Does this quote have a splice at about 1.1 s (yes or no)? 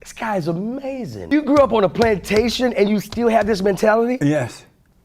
yes